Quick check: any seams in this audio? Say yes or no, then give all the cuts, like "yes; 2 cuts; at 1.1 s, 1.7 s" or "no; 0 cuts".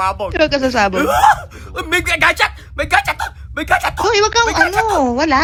no; 0 cuts